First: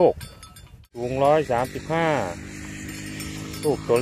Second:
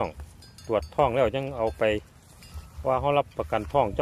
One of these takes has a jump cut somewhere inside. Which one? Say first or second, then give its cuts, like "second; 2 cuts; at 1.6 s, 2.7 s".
first; 1 cut; at 0.9 s